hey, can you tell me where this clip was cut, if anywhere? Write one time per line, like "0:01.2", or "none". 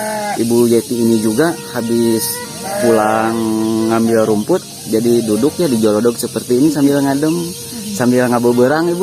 none